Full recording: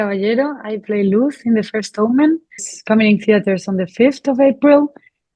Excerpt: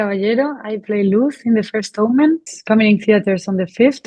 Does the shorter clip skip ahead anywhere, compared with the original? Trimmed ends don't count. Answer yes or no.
yes